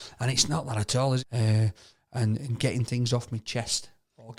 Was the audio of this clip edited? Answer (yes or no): yes